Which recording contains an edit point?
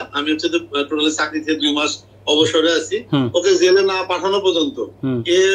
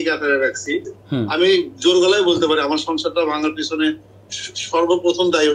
second; 1 cut; at 1.0 s

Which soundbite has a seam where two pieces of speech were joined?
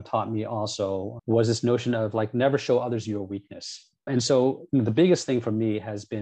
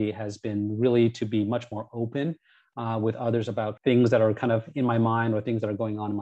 first; 1 cut; at 4.1 s

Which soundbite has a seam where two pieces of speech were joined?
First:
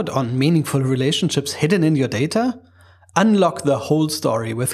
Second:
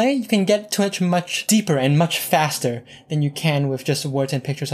second; 1 cut; at 1.4 s

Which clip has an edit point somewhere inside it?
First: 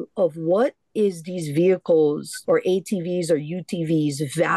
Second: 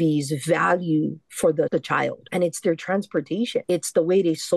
second; 2 cuts; at 1.7 s, 3.6 s

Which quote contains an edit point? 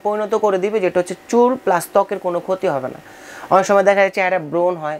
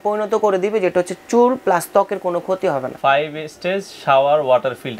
second; 1 cut; at 2.9 s

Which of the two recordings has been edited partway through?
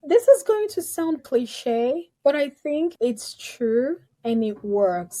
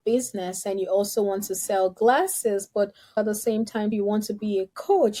first; 1 cut; at 1.2 s

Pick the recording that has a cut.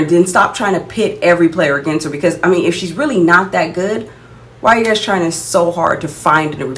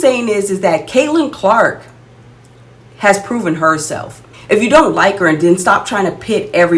second; 1 cut; at 4.3 s

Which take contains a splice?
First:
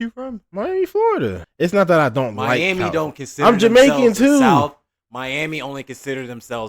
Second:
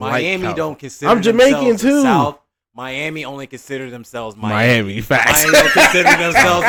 first; 1 cut; at 1.4 s

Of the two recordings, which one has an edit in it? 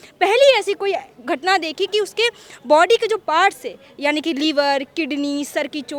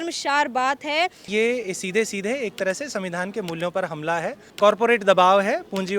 second; 2 cuts; at 1.3 s, 4.4 s

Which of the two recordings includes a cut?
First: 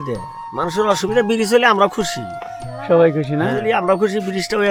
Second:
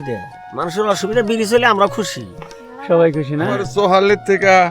second; 1 cut; at 3.6 s

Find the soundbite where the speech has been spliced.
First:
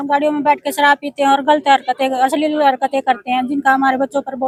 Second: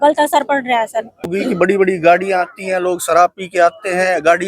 second; 1 cut; at 1.3 s

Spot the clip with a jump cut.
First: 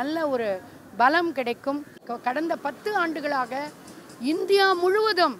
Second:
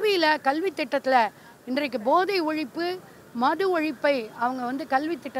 first; 1 cut; at 2.1 s

